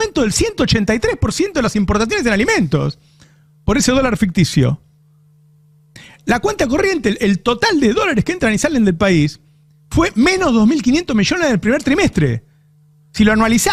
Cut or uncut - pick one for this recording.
uncut